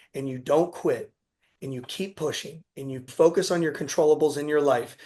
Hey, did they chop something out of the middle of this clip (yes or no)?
yes